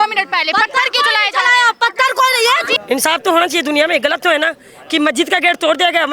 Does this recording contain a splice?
yes; 1 cut; at 2.8 s

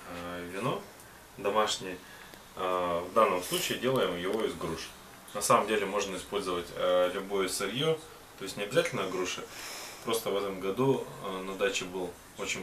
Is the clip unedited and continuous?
yes; 0 cuts

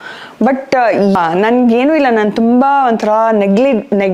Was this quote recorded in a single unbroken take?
no; 1 cut; at 1.2 s

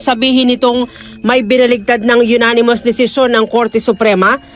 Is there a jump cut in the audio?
no; 0 cuts

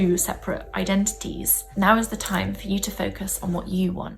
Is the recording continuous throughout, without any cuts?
yes; 0 cuts

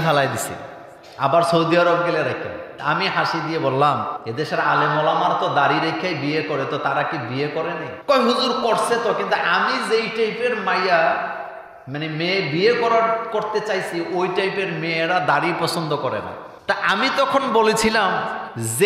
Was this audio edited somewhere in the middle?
yes; 2 cuts; at 2.6 s, 4.1 s

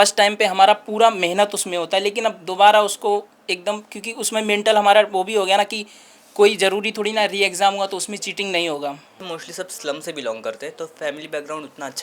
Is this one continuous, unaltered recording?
no; 1 cut; at 9.2 s

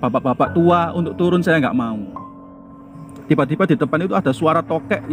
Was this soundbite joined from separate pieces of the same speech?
yes; 1 cut; at 2.6 s

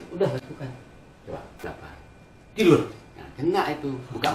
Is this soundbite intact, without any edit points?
no; 1 cut; at 1.6 s

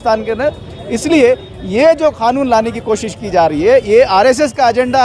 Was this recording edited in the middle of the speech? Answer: no; 0 cuts

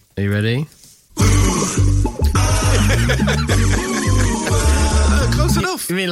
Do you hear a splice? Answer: no; 0 cuts

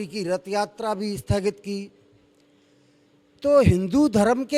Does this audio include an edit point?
no; 0 cuts

